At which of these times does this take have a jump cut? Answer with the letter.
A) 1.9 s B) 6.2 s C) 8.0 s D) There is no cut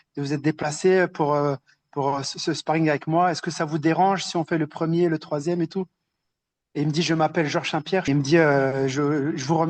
C